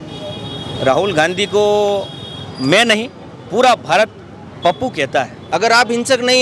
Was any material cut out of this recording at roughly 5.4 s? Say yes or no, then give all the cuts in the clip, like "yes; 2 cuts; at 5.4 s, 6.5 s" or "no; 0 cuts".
yes; 1 cut; at 5.4 s